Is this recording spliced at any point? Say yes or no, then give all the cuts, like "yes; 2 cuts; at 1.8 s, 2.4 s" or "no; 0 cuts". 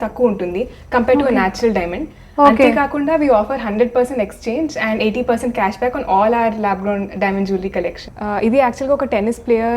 yes; 1 cut; at 8.1 s